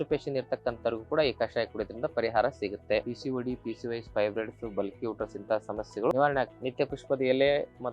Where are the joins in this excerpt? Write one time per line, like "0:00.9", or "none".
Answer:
0:03.0
0:06.6